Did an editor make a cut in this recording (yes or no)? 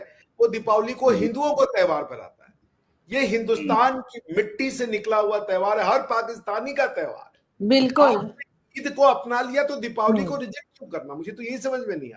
no